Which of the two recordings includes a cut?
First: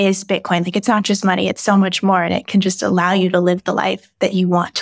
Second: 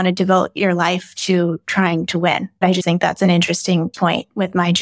second; 2 cuts; at 2.8 s, 3.9 s

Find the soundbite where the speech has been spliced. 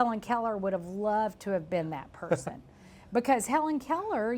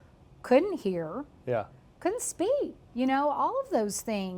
second; 1 cut; at 2.8 s

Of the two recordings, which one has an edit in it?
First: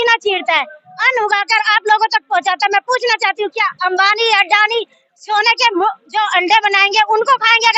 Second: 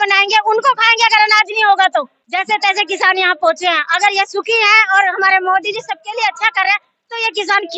second; 1 cut; at 2.2 s

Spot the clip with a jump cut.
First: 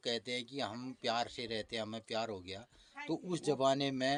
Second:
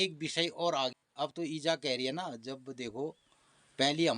second; 1 cut; at 1.3 s

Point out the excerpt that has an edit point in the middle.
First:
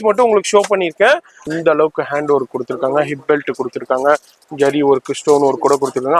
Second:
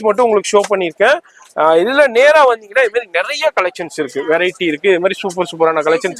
first; 1 cut; at 1.4 s

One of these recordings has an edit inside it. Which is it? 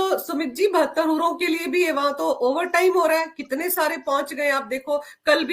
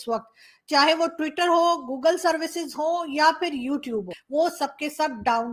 second; 1 cut; at 4.2 s

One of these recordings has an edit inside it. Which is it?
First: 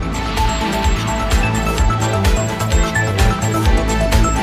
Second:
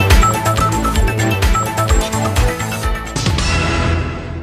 second; 1 cut; at 3.1 s

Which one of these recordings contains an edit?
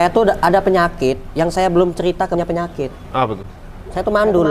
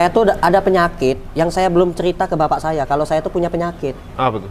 first; 1 cut; at 2.4 s

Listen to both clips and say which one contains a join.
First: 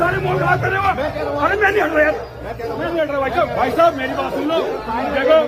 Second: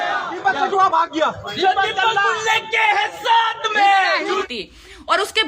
second; 1 cut; at 4.4 s

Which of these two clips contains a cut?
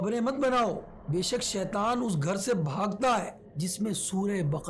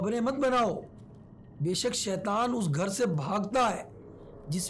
first; 2 cuts; at 0.9 s, 3.4 s

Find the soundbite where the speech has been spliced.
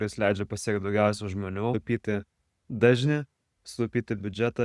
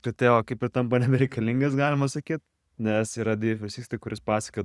first; 1 cut; at 1.7 s

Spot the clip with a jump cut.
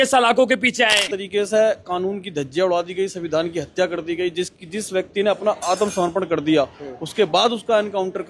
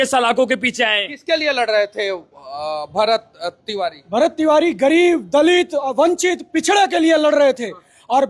first; 1 cut; at 1.1 s

